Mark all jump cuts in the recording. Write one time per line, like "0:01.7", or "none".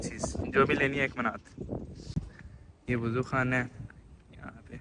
0:02.0